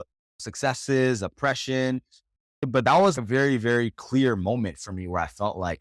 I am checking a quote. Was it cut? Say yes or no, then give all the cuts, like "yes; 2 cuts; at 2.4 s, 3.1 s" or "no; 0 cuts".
yes; 2 cuts; at 2.5 s, 3.2 s